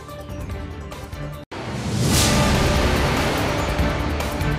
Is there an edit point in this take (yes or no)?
yes